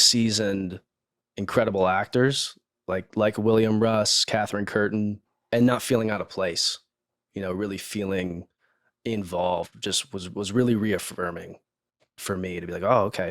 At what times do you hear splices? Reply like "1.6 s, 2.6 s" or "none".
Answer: 5.3 s